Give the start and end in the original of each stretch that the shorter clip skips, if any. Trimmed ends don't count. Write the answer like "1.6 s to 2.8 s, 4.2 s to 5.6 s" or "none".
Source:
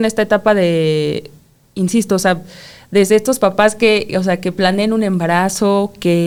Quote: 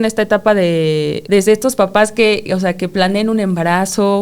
1.2 s to 2.8 s